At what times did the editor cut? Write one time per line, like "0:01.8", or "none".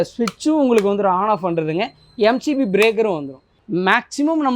0:03.5